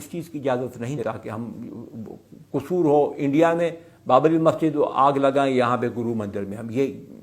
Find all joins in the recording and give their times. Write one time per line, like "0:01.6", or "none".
0:01.0